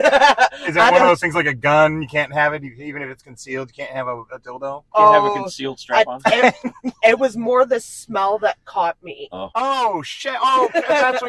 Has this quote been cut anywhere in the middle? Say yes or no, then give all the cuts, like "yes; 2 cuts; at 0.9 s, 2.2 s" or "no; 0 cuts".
no; 0 cuts